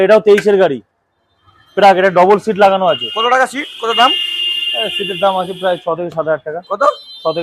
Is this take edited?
no; 0 cuts

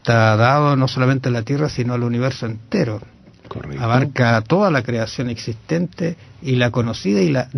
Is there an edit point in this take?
yes; 1 cut; at 1.1 s

